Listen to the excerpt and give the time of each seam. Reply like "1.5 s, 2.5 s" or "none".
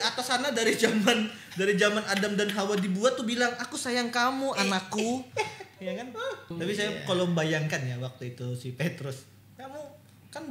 6.5 s